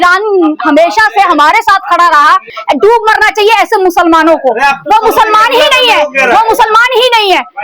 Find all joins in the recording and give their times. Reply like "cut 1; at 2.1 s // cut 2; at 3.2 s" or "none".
cut 1; at 2.5 s